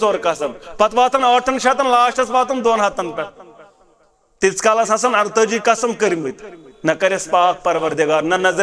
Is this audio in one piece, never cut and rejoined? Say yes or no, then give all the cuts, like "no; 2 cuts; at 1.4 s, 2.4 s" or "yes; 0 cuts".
yes; 0 cuts